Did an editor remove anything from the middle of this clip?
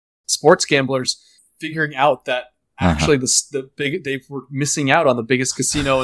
no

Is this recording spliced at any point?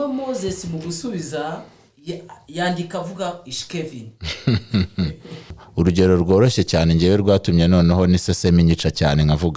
yes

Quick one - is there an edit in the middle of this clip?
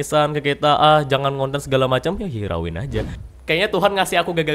yes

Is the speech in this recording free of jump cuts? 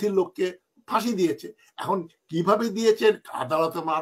yes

